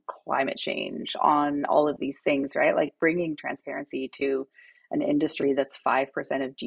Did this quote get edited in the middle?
no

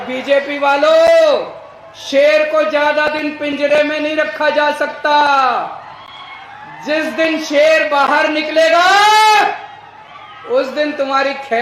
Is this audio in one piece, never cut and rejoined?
yes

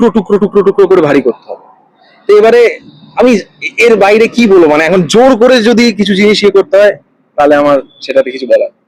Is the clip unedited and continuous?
yes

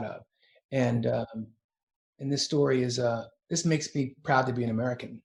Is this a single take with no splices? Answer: yes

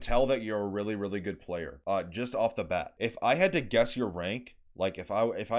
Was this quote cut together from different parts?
yes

